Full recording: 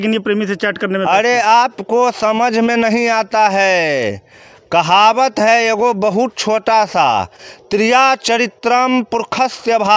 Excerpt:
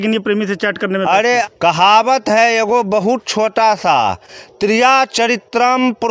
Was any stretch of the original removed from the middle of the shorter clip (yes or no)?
yes